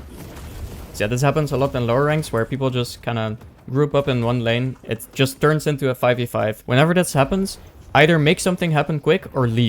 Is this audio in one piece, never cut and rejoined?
no; 1 cut; at 0.9 s

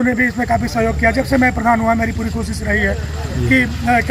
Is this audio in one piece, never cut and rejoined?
yes; 0 cuts

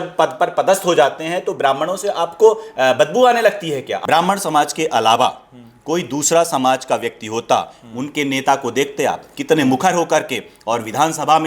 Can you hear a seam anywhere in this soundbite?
yes; 1 cut; at 3.9 s

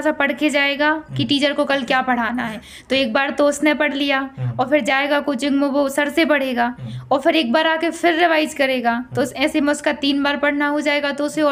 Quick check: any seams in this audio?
no; 0 cuts

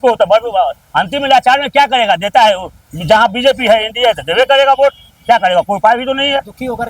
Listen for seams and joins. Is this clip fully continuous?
yes; 0 cuts

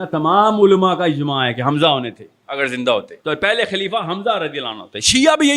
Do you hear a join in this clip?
yes; 1 cut; at 3.1 s

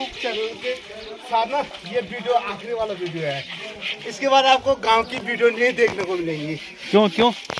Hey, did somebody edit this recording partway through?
no; 0 cuts

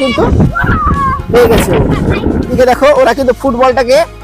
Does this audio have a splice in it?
yes; 1 cut; at 2.5 s

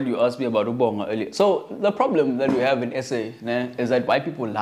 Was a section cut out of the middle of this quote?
no; 0 cuts

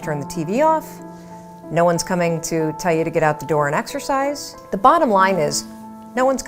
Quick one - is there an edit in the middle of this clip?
yes; 1 cut; at 4.5 s

